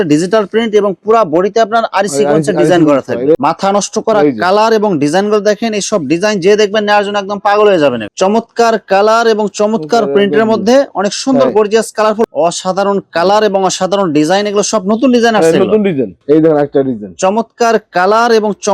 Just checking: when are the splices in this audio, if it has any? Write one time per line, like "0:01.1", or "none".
0:03.4
0:08.1
0:12.3
0:16.2